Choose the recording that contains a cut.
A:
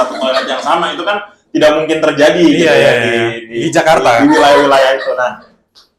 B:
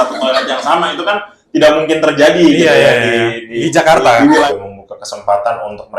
B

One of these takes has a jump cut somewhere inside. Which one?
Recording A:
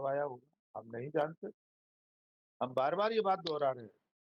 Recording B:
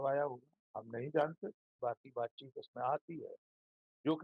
B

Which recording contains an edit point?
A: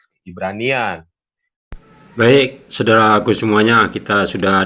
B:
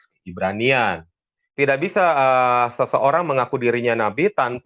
B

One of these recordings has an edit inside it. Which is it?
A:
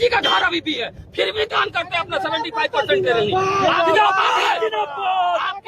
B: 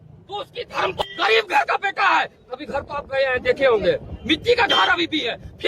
B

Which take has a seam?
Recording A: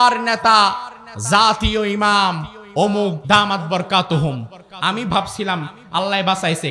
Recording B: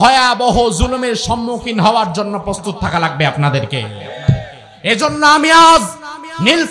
A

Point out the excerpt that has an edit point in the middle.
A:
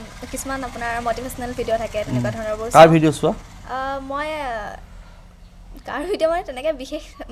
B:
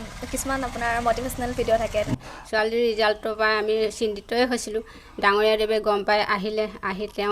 B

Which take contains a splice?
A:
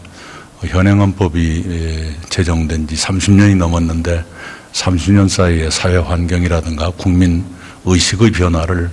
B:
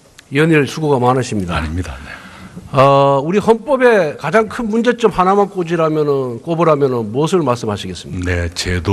B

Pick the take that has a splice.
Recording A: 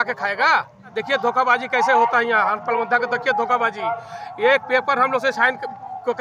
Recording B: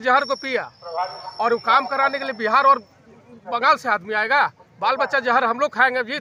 A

